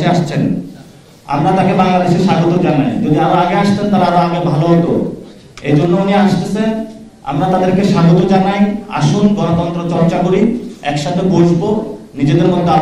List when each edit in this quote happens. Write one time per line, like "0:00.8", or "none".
none